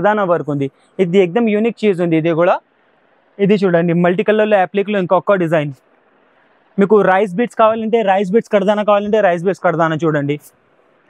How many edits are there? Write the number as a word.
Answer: zero